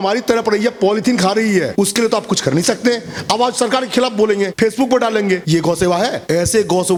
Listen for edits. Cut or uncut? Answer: uncut